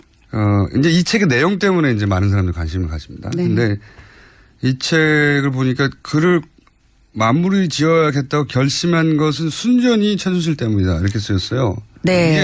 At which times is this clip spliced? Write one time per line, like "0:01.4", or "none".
0:04.1